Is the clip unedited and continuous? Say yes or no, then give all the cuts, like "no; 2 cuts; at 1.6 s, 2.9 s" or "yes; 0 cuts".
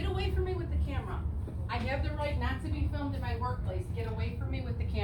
yes; 0 cuts